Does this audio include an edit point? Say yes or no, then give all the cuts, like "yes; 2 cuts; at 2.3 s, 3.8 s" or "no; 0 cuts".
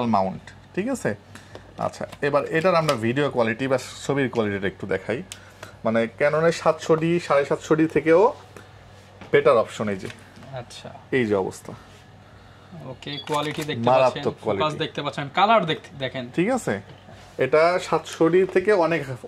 no; 0 cuts